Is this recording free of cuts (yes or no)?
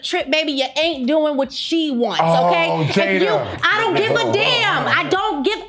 yes